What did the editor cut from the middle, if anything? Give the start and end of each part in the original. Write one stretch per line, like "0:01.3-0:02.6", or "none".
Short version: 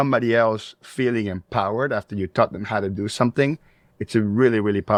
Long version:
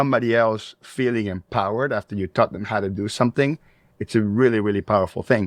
none